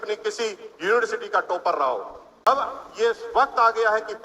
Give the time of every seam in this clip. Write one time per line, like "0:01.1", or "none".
0:02.5